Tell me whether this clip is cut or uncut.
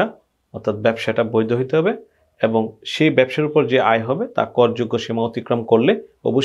uncut